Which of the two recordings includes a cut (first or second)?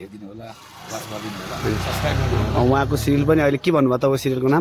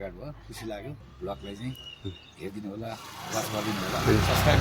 second